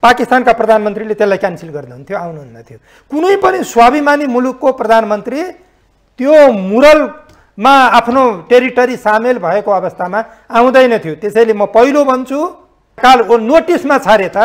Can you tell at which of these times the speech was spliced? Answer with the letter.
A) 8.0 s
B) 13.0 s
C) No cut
B